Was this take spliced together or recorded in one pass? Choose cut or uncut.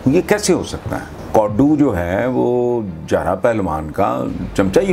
cut